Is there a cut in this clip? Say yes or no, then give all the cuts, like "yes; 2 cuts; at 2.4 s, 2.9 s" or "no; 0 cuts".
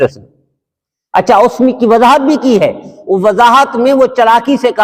no; 0 cuts